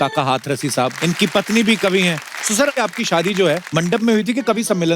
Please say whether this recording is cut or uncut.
cut